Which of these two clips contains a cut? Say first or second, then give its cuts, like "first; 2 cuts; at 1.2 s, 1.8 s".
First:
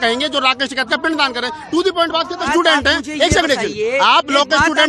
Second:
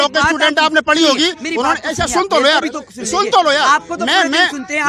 first; 1 cut; at 2.5 s